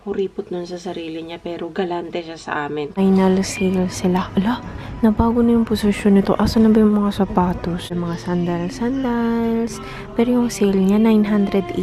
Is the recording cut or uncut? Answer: cut